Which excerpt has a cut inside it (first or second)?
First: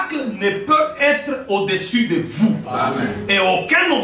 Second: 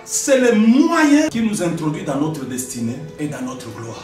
second